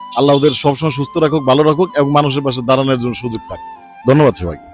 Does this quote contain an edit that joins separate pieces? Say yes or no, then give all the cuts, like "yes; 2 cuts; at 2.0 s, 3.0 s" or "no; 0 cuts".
no; 0 cuts